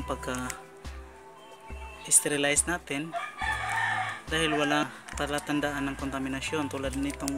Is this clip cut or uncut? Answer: cut